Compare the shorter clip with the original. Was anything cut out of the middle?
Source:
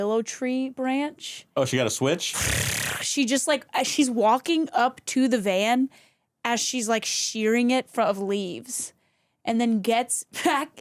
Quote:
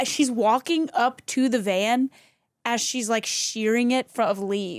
no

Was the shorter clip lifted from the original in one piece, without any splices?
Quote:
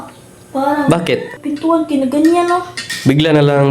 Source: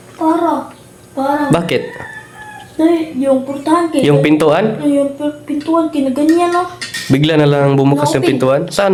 no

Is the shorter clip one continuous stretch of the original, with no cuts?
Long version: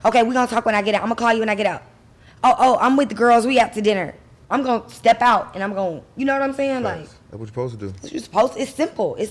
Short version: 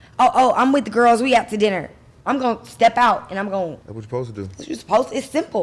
no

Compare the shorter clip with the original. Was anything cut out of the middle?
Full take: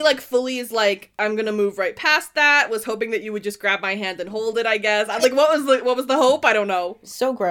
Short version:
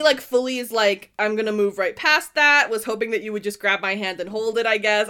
no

